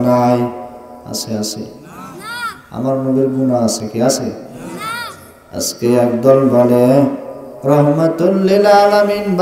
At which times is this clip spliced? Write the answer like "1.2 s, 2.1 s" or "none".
1.0 s